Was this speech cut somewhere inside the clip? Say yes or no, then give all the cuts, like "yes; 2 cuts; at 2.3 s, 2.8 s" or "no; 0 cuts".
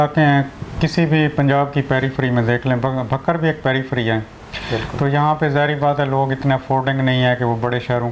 no; 0 cuts